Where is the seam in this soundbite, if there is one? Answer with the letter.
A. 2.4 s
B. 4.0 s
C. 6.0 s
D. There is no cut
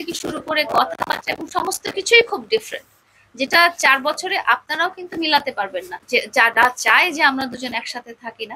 C